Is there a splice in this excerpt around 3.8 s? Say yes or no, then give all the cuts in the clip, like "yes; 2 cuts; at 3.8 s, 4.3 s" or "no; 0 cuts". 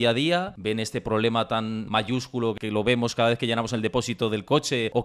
no; 1 cut; at 2.1 s